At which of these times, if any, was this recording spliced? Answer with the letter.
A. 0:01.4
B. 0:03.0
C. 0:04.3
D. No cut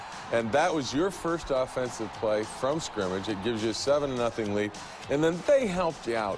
B